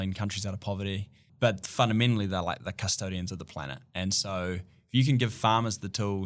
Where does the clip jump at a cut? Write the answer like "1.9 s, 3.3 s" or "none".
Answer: 1.3 s